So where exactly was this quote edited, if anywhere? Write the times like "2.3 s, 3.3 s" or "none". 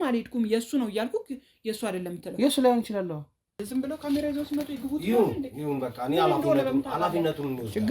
3.5 s